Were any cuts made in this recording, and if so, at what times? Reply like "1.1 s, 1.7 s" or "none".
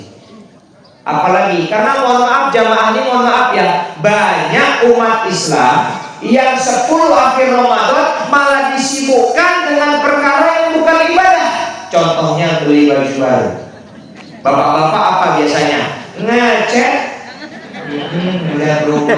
none